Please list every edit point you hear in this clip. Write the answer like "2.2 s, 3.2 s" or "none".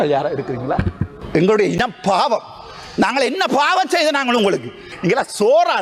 1.1 s, 4.8 s